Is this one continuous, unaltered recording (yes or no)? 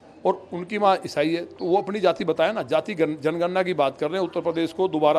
yes